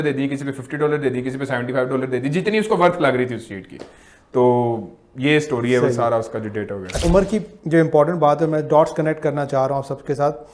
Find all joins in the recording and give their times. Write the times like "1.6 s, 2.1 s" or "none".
7.0 s

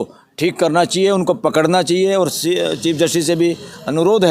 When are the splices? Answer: none

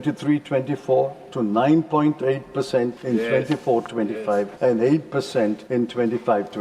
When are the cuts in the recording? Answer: 3.0 s, 4.5 s, 5.6 s

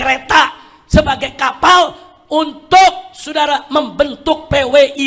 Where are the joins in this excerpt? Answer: none

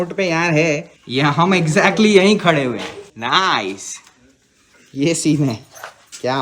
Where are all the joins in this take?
none

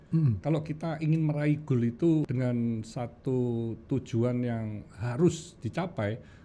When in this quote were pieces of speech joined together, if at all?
2.3 s

